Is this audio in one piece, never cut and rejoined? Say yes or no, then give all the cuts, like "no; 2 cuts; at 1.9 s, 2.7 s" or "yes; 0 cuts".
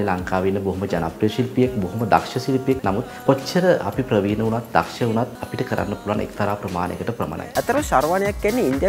no; 3 cuts; at 2.8 s, 5.4 s, 7.5 s